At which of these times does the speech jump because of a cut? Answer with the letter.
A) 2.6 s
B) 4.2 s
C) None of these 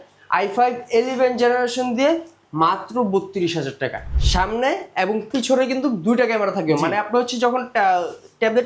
B